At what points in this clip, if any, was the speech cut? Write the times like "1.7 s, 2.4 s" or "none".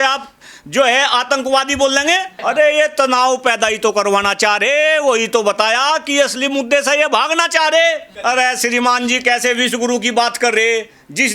2.3 s, 8.1 s